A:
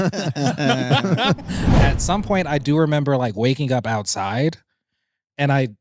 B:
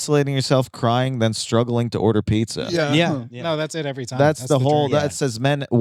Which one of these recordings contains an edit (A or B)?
A